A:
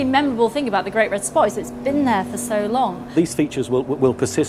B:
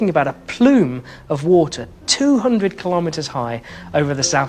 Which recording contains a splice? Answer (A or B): A